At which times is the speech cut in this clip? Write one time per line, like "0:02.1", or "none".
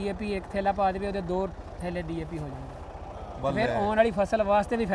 none